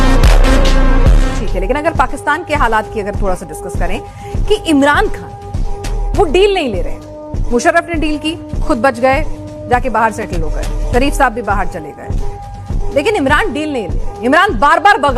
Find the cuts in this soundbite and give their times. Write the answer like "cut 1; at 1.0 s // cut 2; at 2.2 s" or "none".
cut 1; at 1.4 s